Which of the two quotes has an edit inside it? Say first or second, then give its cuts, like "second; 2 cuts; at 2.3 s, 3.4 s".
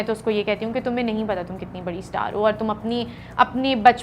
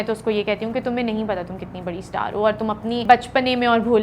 second; 1 cut; at 3.0 s